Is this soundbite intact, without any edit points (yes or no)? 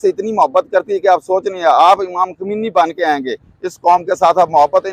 yes